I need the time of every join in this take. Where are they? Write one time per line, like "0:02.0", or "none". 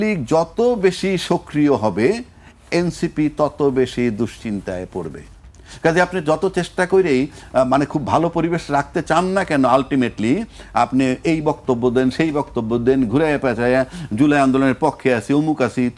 none